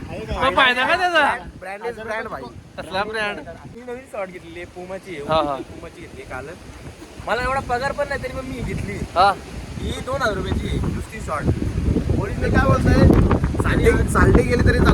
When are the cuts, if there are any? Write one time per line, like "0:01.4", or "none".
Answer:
0:03.8

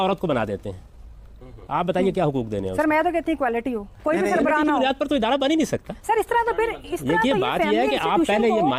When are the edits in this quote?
none

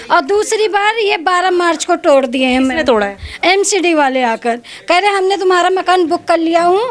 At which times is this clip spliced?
none

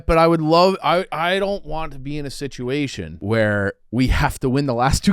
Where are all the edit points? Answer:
0:03.1
0:03.8

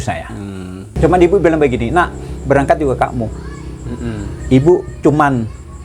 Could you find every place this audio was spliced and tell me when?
0:00.9

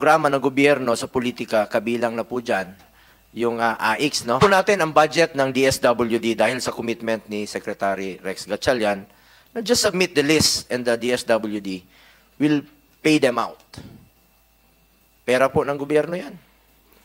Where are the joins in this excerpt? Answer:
0:04.4

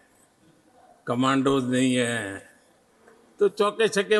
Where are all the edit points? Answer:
none

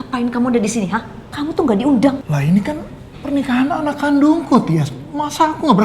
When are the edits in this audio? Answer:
0:01.2
0:02.2

